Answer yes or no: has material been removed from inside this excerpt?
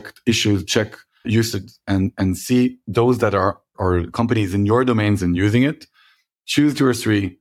yes